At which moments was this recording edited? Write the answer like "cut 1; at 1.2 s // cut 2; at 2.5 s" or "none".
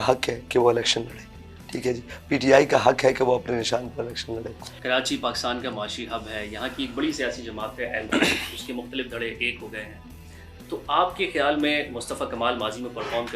none